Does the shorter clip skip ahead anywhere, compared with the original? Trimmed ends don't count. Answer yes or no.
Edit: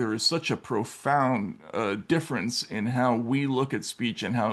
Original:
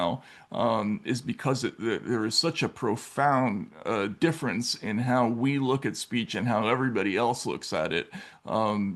no